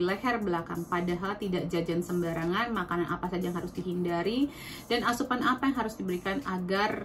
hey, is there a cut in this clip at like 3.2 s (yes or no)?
no